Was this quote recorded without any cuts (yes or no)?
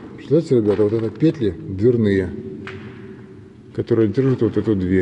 yes